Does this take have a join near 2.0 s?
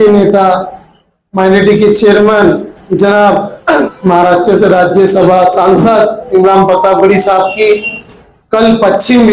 no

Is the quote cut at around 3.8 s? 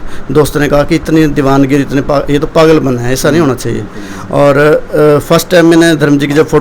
no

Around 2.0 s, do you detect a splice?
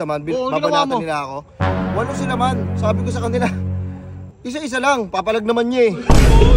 no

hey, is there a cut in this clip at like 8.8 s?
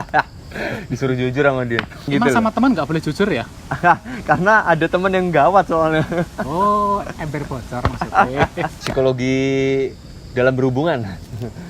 yes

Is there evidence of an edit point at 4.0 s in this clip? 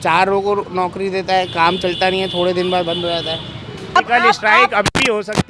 yes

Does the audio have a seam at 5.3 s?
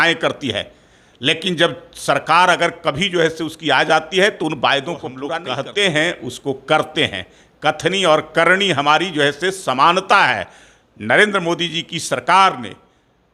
yes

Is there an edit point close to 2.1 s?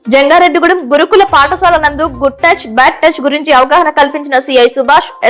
no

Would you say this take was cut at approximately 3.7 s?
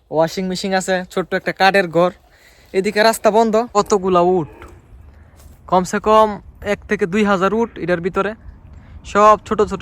yes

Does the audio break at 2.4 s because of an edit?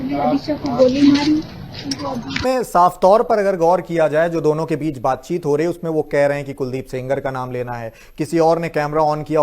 yes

